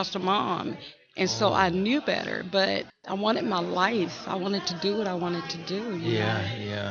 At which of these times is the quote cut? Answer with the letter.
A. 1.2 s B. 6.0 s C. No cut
C